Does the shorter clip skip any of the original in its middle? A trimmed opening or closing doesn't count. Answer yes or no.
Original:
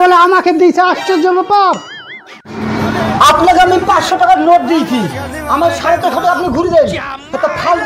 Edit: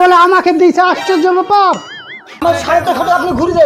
yes